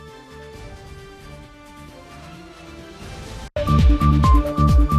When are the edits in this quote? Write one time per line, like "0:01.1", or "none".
0:03.5